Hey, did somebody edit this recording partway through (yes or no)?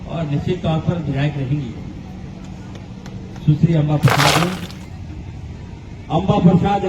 yes